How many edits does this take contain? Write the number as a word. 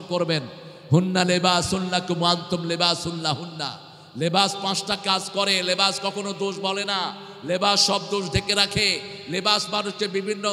zero